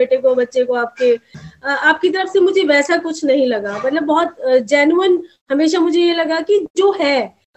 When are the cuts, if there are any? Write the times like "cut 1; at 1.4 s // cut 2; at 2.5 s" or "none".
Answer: cut 1; at 1.3 s

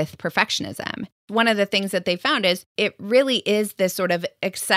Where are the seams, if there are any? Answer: cut 1; at 1.2 s // cut 2; at 2.7 s

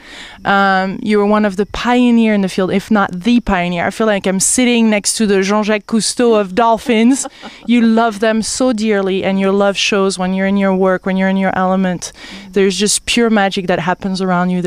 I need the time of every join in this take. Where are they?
cut 1; at 13.4 s

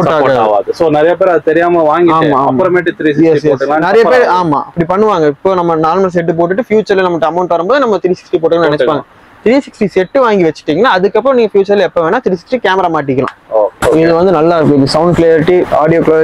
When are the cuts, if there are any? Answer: cut 1; at 13.8 s

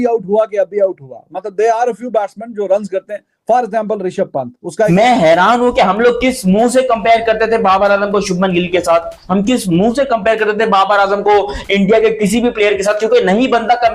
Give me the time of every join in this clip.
cut 1; at 4.9 s

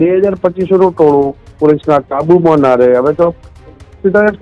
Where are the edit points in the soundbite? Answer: none

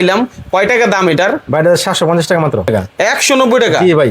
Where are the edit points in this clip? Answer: cut 1; at 2.7 s

